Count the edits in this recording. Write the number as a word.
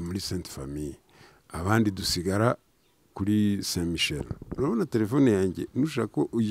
one